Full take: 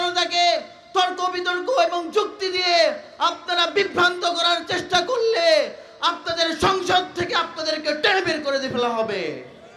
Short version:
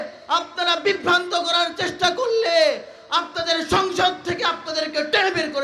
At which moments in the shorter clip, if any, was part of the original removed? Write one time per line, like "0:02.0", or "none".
none